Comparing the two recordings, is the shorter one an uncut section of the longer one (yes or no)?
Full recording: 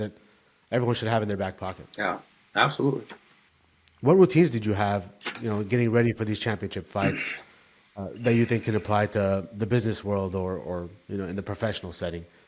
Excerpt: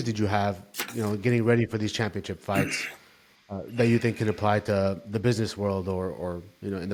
yes